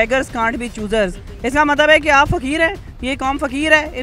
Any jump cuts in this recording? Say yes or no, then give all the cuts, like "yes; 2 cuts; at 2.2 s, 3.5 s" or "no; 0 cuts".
no; 0 cuts